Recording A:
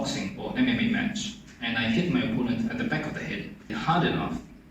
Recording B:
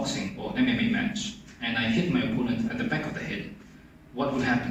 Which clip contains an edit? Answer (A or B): A